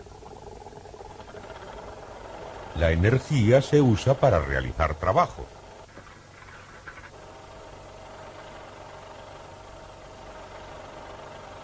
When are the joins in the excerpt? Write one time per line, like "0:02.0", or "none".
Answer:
0:03.5